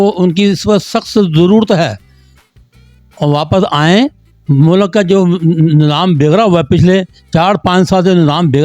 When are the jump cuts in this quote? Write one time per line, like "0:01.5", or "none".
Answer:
none